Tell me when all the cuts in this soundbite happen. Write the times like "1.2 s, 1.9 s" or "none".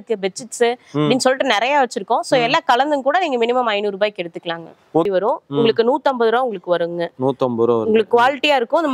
5.1 s